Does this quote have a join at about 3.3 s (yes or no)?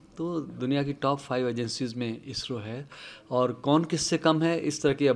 no